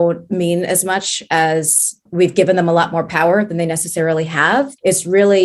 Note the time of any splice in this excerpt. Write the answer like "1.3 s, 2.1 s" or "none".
none